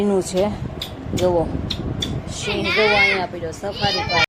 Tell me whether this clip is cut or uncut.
uncut